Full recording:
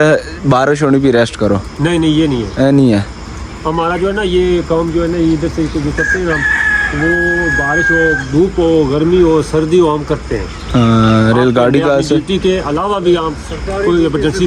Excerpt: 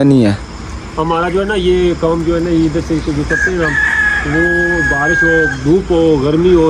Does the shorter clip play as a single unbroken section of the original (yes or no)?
yes